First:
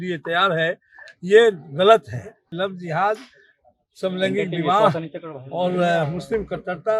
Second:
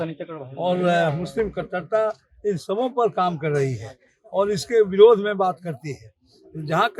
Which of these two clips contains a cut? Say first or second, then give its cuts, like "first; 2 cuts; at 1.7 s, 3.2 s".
first; 1 cut; at 2.5 s